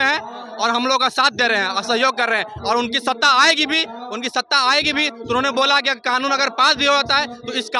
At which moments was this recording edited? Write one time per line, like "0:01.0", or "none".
none